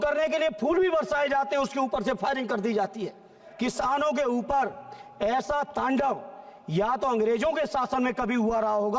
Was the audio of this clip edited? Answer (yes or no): yes